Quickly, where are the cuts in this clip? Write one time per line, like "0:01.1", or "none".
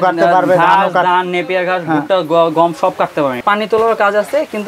0:03.4